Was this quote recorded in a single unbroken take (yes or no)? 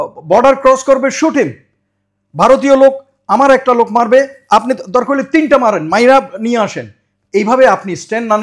yes